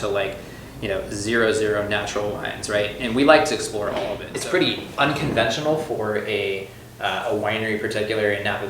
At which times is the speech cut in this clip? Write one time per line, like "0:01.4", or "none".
0:04.3